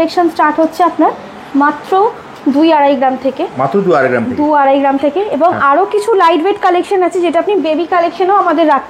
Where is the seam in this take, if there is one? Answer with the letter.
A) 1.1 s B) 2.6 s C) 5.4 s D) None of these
D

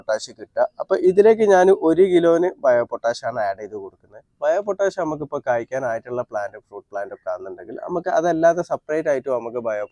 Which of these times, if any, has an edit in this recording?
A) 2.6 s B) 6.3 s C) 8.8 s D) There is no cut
D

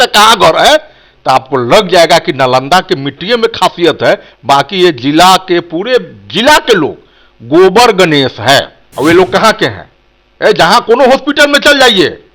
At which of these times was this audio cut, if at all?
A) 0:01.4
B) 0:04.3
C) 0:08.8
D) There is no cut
C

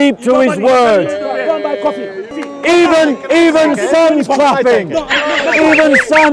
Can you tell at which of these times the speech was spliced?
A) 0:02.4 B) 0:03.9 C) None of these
A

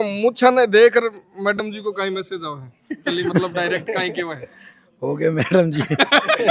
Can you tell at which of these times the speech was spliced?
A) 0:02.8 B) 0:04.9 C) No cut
C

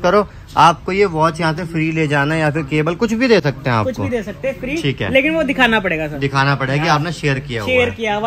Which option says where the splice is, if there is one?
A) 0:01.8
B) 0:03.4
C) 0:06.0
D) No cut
D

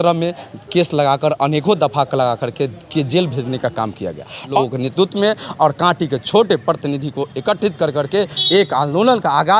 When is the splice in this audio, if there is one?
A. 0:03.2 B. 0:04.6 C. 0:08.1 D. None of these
B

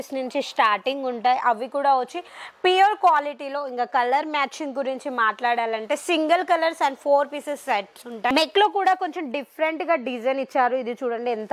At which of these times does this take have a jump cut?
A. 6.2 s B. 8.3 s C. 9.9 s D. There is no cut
B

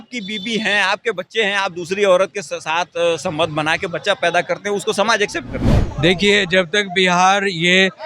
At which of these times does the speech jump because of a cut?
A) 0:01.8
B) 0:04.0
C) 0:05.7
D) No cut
C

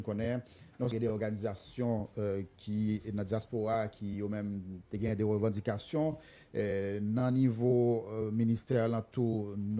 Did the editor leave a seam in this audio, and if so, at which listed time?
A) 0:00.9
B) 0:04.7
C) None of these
A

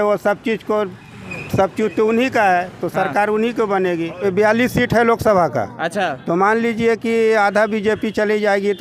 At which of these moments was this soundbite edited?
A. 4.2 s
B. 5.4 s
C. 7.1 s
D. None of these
A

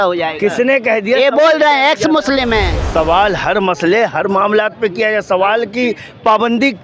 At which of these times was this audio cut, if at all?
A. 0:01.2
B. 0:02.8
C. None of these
B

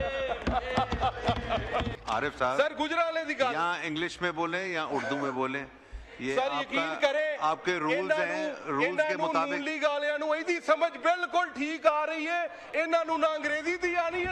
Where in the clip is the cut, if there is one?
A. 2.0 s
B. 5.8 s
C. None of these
A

